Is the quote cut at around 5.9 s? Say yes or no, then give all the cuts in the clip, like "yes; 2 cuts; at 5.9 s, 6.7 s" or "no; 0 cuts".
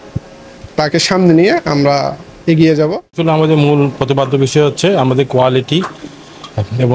no; 1 cut; at 3.1 s